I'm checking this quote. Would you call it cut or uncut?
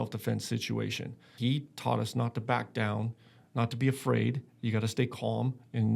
cut